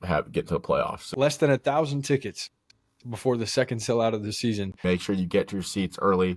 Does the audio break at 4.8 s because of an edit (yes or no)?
yes